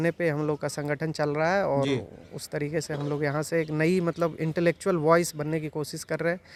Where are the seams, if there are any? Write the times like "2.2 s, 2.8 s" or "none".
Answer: none